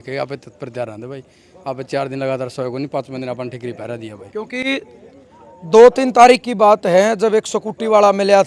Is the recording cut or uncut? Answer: uncut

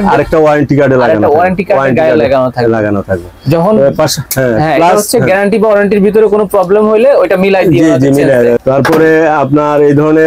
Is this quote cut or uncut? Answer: uncut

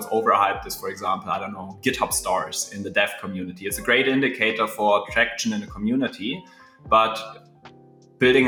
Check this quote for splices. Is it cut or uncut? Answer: uncut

